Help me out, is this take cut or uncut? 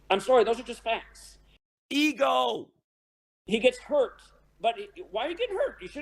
uncut